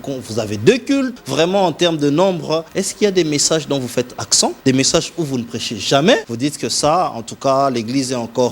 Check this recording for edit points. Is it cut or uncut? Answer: cut